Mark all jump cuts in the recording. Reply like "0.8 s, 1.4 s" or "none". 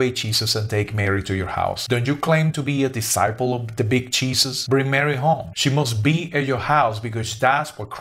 none